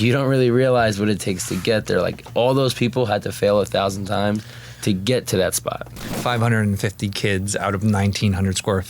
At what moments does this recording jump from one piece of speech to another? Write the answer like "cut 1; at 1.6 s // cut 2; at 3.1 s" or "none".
cut 1; at 6.1 s